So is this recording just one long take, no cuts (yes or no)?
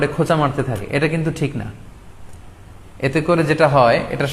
yes